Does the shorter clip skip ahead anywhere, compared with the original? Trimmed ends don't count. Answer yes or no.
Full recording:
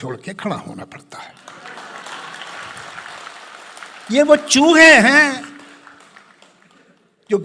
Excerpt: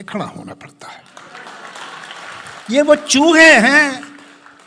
yes